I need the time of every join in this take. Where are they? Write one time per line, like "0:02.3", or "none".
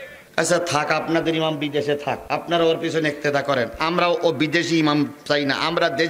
0:02.2